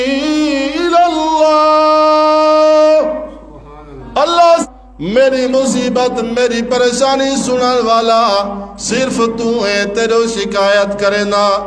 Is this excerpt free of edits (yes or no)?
no